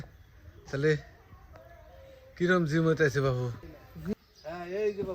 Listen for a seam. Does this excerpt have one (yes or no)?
yes